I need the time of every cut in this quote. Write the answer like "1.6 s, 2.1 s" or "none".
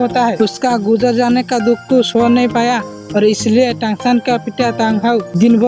none